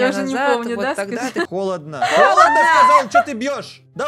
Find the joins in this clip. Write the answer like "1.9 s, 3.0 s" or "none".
1.5 s